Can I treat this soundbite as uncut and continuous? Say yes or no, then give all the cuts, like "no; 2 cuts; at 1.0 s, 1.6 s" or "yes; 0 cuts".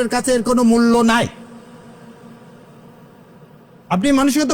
yes; 0 cuts